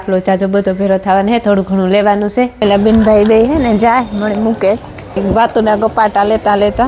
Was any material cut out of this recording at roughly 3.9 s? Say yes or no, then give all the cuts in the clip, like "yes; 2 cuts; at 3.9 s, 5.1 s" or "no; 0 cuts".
no; 2 cuts; at 2.6 s, 5.2 s